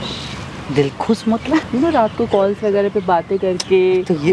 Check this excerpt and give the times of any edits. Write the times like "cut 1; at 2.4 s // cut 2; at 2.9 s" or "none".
cut 1; at 1.7 s